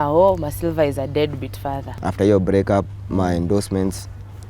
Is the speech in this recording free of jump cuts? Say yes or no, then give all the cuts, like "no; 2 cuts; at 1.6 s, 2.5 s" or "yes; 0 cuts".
no; 1 cut; at 1.9 s